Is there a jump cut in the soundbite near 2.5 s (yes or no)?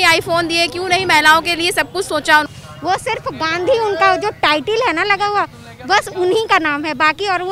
yes